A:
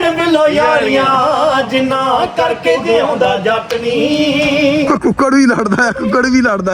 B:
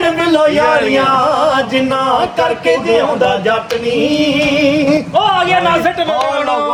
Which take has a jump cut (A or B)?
A